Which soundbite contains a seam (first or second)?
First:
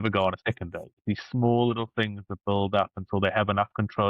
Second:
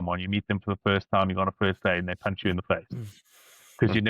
first